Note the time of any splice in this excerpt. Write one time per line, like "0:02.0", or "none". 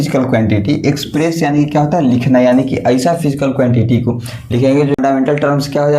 0:05.0

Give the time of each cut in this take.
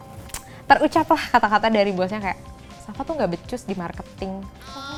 none

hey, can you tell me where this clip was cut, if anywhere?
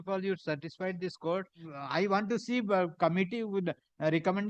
0:01.7

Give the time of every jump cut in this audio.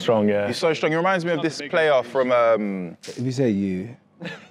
none

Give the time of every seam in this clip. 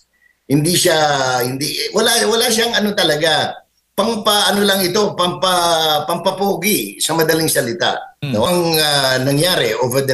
0:08.5

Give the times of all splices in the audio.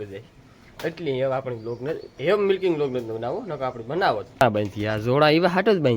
0:04.4

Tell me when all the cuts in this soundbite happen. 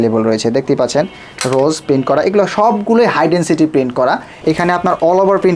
0:04.3

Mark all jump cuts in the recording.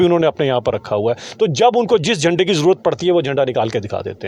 none

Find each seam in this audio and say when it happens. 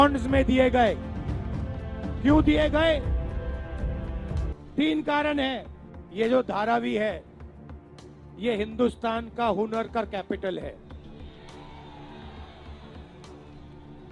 0:06.0
0:10.8
0:12.4

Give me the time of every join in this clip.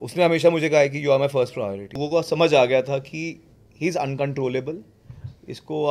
0:02.0

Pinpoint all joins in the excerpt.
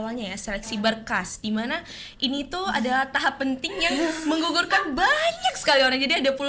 none

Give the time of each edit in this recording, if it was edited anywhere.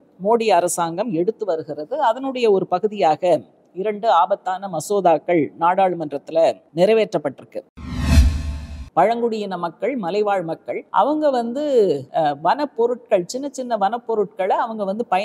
0:06.6
0:08.2
0:10.8
0:12.1

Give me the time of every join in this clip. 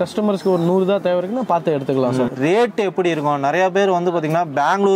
0:02.3

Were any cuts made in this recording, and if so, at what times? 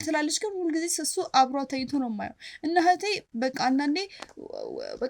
none

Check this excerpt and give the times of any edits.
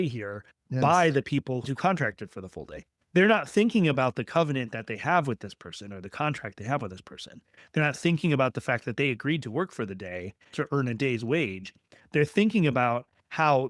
0:01.7
0:10.5

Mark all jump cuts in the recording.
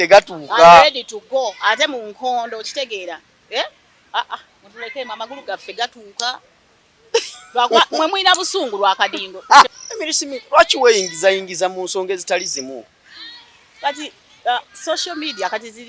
0:09.7

